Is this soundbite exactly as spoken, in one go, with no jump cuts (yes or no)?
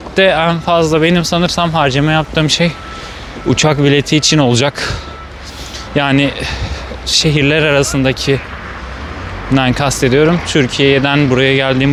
yes